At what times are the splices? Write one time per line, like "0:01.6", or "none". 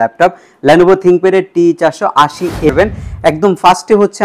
0:02.7